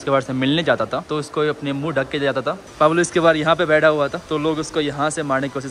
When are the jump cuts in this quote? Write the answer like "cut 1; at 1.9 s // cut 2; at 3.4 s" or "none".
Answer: cut 1; at 2.6 s // cut 2; at 4.2 s